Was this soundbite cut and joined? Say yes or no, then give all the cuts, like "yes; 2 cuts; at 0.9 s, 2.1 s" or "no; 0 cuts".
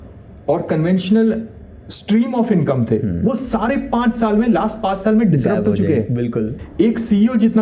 yes; 1 cut; at 6.6 s